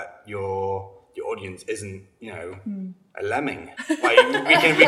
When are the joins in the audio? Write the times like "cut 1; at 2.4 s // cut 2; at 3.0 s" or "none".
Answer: cut 1; at 3.7 s